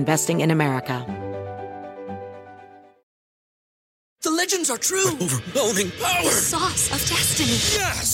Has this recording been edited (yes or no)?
yes